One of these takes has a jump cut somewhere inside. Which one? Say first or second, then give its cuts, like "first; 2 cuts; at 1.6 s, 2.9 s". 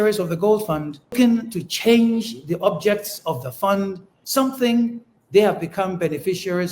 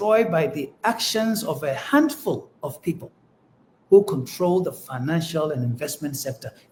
first; 2 cuts; at 1.1 s, 4.1 s